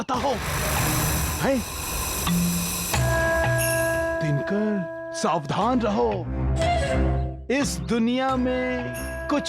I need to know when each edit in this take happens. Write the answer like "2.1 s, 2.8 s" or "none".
none

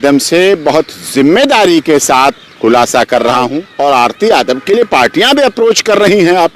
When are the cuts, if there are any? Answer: 3.6 s

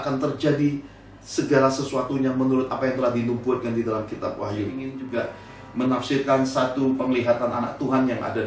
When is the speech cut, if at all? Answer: 5.1 s

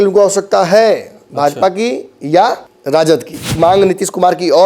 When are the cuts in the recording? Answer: 2.7 s, 3.5 s

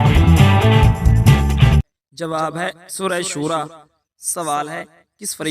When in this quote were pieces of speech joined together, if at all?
1.9 s

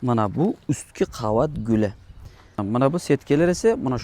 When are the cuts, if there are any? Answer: 2.6 s

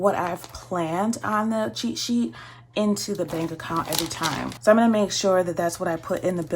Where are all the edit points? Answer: 4.5 s

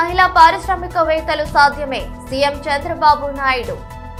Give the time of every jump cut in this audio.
none

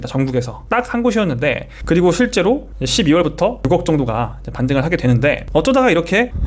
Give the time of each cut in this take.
1.7 s, 3.6 s, 5.4 s

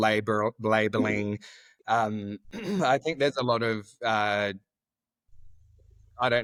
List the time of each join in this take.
none

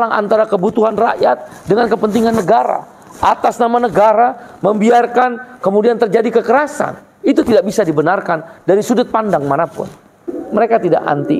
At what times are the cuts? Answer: 10.3 s

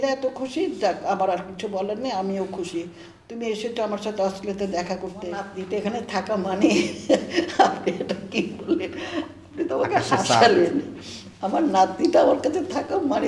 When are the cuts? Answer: 5.4 s

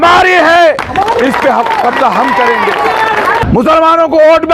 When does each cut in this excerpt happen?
3.4 s

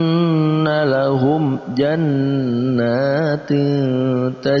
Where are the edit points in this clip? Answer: none

